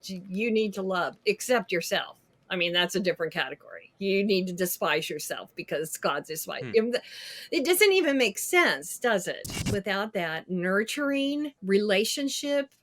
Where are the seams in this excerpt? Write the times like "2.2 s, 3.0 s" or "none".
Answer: 9.5 s, 11.6 s